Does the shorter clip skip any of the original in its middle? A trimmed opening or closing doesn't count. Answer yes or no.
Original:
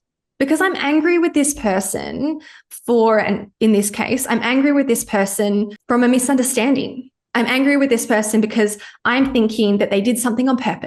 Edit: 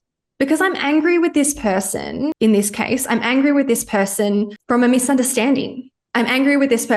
yes